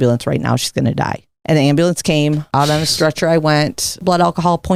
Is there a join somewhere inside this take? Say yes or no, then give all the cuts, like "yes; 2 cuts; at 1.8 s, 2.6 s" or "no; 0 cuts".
yes; 3 cuts; at 1.3 s, 2.4 s, 4.0 s